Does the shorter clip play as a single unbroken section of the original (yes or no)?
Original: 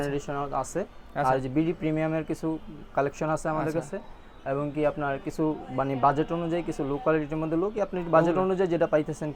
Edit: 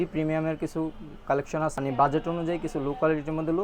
no